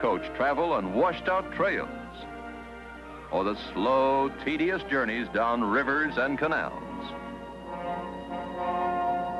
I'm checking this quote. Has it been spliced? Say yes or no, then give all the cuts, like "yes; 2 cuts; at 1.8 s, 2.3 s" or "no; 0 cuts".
no; 0 cuts